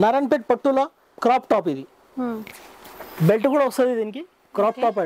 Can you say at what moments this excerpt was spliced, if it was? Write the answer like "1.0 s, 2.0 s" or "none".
1.0 s